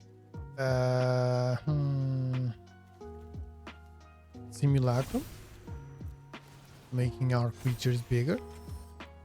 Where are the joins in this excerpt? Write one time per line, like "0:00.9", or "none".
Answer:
0:02.5
0:04.1